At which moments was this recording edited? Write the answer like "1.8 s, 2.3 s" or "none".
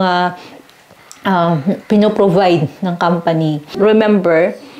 3.6 s